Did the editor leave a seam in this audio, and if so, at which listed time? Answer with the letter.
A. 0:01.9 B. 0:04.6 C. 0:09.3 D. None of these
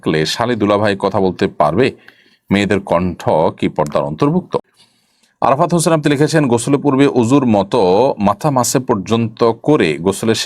B